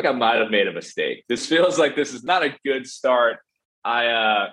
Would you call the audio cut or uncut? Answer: cut